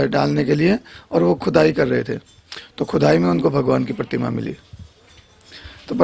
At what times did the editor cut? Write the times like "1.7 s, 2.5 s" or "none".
none